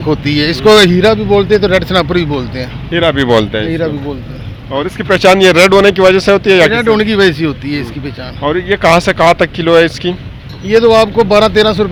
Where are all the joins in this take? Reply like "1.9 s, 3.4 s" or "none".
none